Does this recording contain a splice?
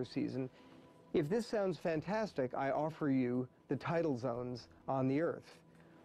yes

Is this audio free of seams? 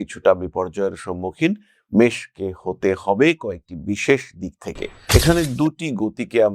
no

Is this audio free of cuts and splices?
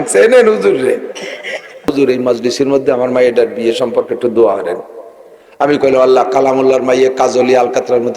no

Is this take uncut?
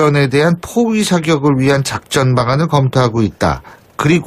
no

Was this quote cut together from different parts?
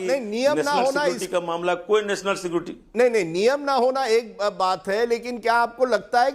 no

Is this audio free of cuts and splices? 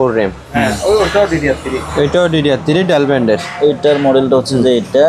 yes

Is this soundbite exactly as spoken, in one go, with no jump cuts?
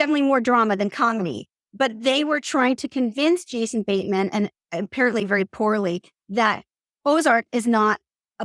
yes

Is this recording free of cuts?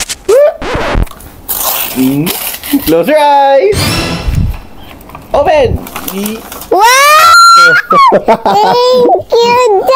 yes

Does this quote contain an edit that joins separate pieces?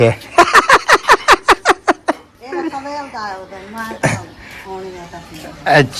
no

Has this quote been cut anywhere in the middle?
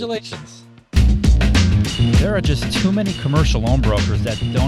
yes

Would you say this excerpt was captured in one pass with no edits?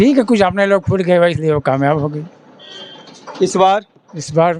yes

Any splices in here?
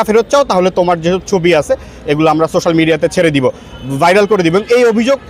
no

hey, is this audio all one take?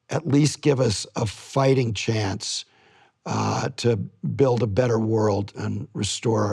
yes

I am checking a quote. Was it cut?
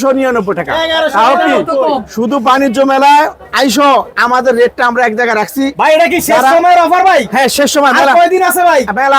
no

